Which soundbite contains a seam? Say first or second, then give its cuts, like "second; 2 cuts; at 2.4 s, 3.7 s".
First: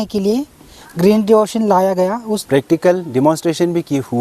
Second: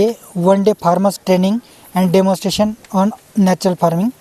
first; 1 cut; at 2.3 s